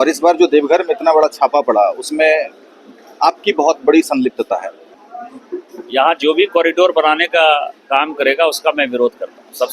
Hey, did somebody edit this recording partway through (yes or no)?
yes